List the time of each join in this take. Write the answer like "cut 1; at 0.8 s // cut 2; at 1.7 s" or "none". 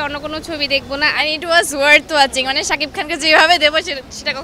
cut 1; at 1.1 s